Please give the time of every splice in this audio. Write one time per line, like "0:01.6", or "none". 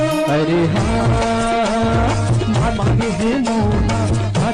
none